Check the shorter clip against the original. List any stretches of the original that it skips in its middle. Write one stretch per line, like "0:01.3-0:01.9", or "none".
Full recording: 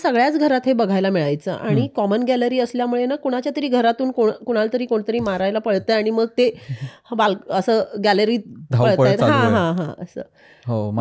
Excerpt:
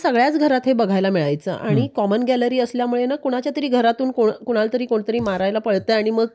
none